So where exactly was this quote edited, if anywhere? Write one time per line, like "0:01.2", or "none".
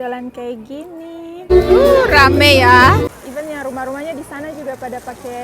0:01.4
0:03.2